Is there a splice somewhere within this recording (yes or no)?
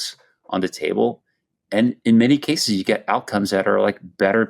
no